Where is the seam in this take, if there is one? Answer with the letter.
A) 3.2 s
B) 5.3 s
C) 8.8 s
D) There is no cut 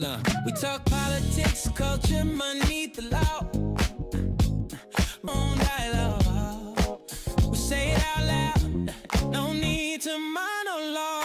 B